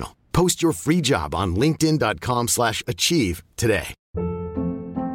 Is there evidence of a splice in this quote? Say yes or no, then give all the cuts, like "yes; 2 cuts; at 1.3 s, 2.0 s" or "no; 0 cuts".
yes; 1 cut; at 4.0 s